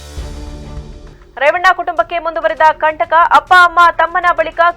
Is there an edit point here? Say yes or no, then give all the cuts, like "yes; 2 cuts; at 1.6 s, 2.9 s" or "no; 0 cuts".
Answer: yes; 1 cut; at 1.2 s